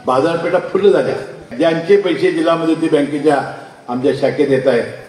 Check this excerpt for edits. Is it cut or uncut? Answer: cut